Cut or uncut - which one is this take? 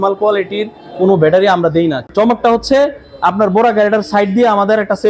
cut